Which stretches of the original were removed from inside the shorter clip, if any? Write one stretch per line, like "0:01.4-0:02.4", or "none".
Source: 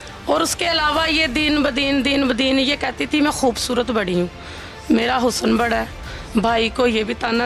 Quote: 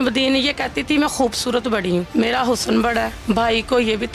0:04.3-0:04.8
0:05.9-0:06.2